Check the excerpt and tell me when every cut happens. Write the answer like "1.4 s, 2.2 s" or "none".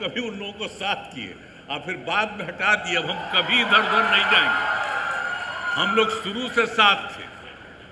none